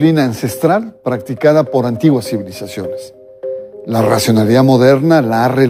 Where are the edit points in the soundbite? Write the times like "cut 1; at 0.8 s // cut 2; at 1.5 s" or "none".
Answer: none